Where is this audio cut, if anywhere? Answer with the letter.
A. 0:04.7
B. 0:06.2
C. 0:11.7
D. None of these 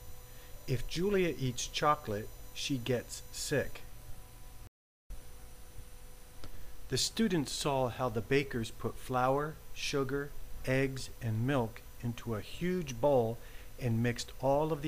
A